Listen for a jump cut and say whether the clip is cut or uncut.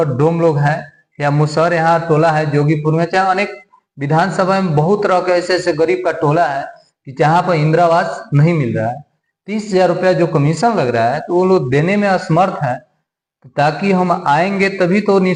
uncut